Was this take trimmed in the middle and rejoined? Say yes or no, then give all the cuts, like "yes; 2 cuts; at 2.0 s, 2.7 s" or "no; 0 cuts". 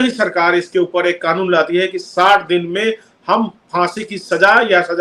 no; 0 cuts